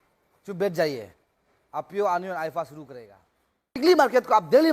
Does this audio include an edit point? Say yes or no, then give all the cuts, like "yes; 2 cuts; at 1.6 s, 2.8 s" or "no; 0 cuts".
yes; 1 cut; at 3.8 s